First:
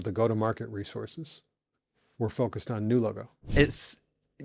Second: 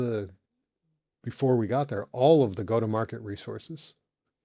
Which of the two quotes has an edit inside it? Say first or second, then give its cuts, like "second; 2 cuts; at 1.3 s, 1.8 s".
first; 1 cut; at 3.3 s